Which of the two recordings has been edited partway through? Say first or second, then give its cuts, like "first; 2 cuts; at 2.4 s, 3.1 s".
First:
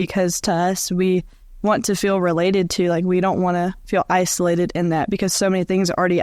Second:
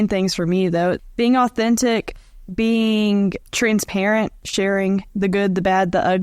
second; 3 cuts; at 1.0 s, 3.4 s, 4.4 s